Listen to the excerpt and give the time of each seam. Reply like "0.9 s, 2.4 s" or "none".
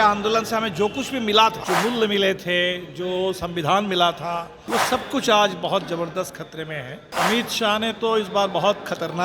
1.6 s, 4.5 s, 7.1 s